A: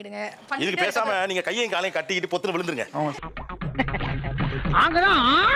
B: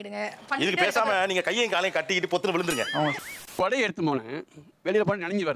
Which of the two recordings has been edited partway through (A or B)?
B